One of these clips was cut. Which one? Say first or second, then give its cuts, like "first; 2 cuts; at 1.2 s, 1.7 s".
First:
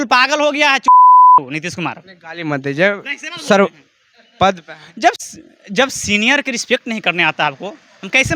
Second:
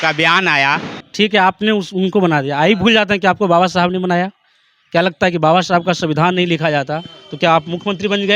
second; 1 cut; at 1.0 s